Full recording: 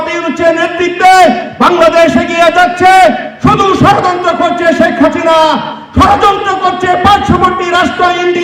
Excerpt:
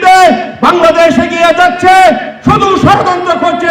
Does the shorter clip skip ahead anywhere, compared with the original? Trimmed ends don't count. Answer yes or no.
no